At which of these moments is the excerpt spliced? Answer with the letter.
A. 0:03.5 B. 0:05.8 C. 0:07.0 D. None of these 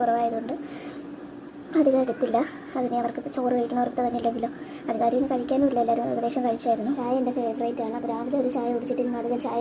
C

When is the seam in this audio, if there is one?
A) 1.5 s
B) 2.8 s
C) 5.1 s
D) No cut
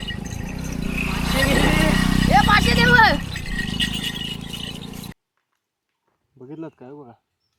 C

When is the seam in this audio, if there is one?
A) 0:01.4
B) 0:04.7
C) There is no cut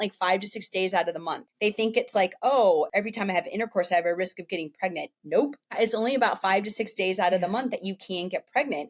A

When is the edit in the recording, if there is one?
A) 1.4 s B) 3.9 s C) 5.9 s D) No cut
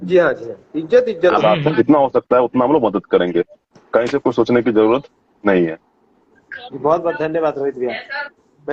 A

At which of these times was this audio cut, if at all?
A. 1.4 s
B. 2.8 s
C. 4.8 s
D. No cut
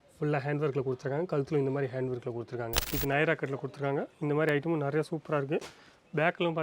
B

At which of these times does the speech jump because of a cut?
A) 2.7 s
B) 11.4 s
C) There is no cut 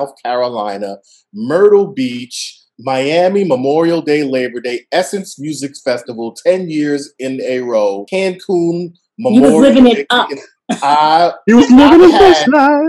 C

